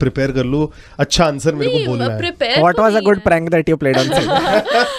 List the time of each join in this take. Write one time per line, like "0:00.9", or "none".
none